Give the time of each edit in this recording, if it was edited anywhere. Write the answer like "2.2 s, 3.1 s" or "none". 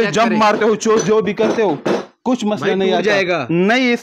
none